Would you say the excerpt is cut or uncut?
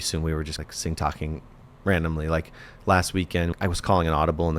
cut